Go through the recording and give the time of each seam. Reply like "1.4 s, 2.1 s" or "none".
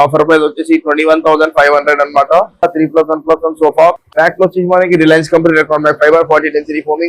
2.7 s